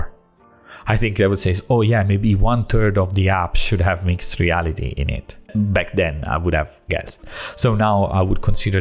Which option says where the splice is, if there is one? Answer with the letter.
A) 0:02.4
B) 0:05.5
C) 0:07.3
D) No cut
B